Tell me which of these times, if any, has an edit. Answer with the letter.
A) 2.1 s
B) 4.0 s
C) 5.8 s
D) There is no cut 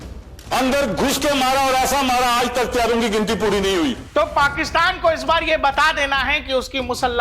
B